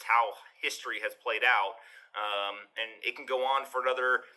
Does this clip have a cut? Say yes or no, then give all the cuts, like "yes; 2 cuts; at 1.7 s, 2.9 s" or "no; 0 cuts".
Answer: no; 0 cuts